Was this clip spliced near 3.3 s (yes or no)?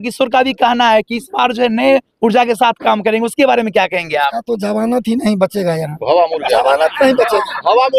no